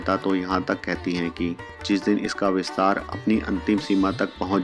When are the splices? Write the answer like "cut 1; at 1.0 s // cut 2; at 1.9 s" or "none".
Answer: none